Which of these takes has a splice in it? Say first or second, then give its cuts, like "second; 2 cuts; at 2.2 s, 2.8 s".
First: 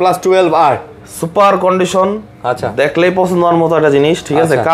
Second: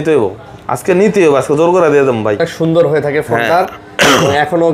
second; 1 cut; at 2.4 s